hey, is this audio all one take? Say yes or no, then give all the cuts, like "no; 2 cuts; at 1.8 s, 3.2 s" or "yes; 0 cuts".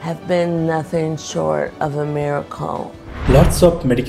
no; 1 cut; at 3.1 s